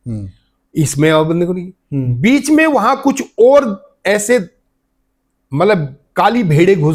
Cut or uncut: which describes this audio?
uncut